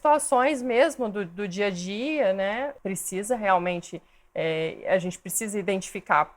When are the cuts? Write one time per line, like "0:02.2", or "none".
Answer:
0:02.8